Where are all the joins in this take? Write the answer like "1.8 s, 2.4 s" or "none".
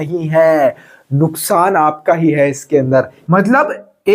3.2 s